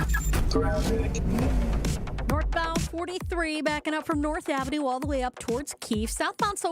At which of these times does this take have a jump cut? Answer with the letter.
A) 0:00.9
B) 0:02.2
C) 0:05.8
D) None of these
B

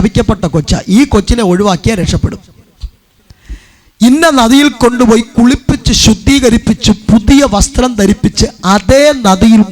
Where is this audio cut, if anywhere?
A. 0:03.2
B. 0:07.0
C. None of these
A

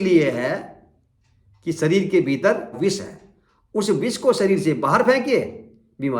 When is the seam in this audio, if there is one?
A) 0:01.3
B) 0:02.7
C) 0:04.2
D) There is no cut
B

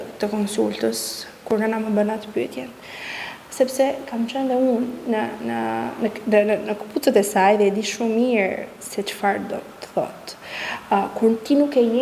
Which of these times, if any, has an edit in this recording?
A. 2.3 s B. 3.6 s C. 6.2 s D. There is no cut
D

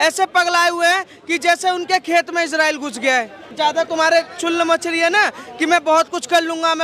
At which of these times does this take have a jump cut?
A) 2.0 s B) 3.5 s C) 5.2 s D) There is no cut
B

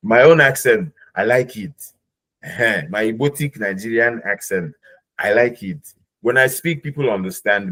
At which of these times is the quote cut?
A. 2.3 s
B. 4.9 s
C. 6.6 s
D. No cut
D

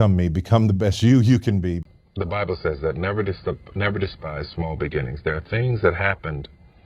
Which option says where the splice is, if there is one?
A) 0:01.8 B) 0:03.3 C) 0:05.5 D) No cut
A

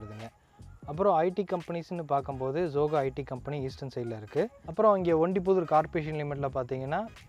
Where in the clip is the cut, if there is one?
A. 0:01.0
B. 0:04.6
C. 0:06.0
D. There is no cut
B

